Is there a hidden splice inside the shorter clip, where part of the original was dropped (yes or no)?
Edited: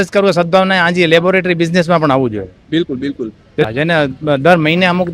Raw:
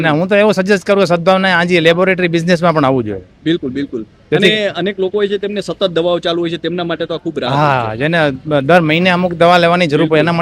yes